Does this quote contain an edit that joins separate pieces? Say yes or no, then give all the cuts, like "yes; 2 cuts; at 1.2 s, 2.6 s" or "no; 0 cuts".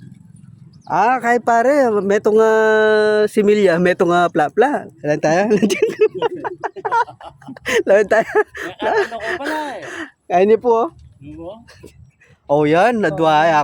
no; 0 cuts